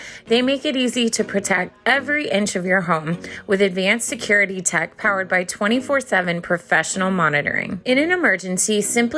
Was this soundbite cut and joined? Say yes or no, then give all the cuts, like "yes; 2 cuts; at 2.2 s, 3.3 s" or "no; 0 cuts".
yes; 1 cut; at 7.7 s